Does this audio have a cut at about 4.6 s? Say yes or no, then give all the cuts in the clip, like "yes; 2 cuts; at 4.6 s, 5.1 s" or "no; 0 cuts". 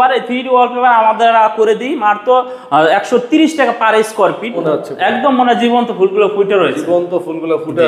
yes; 1 cut; at 4.6 s